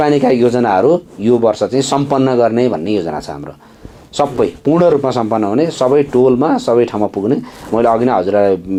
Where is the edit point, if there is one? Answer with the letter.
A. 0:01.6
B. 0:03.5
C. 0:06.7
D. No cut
D